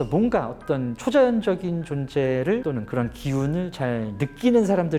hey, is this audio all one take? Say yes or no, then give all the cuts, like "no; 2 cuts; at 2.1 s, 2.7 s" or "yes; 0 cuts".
yes; 0 cuts